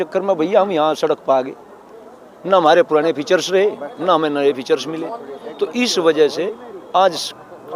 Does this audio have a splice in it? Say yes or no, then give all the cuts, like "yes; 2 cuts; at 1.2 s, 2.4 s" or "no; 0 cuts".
no; 0 cuts